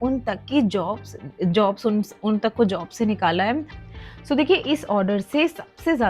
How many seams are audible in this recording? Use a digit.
1